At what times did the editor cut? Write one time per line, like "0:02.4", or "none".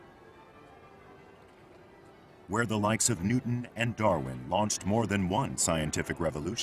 0:04.2